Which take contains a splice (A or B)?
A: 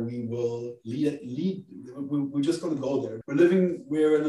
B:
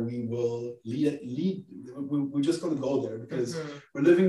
A